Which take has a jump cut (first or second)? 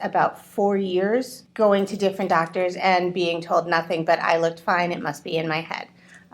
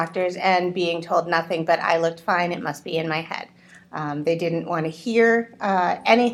first